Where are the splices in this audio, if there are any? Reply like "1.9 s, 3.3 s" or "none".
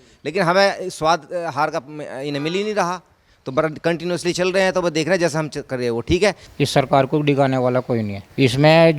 6.4 s